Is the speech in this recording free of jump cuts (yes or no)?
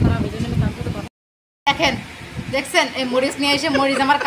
no